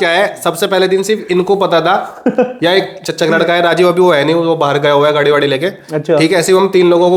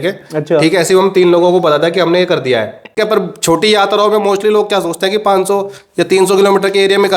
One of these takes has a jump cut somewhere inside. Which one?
second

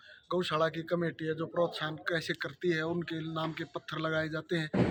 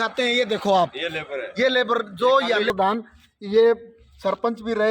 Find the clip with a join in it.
second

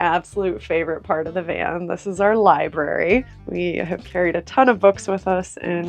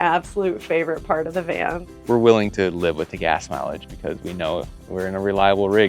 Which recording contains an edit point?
second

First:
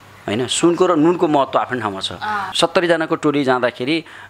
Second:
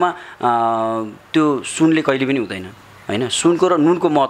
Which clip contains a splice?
first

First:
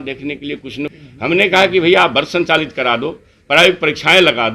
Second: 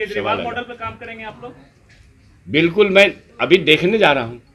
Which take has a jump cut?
first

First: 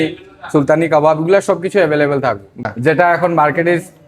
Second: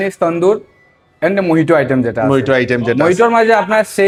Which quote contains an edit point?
first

